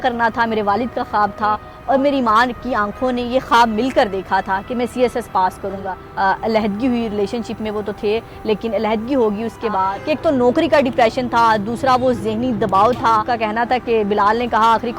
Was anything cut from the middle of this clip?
yes; 4 cuts; at 1.7 s, 6.0 s, 9.9 s, 13.3 s

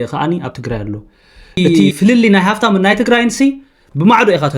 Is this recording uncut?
no; 1 cut; at 1.6 s

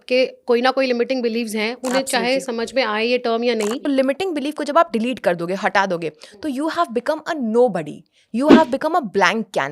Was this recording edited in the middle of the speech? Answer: yes; 1 cut; at 3.8 s

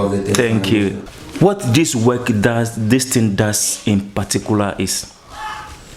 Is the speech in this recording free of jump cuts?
no; 1 cut; at 1.0 s

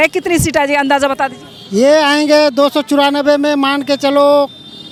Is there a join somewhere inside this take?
no; 0 cuts

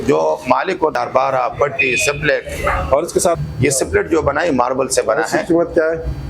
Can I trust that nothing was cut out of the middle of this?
no; 2 cuts; at 0.9 s, 3.4 s

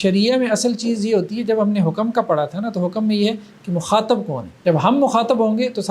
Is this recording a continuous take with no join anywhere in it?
no; 1 cut; at 4.5 s

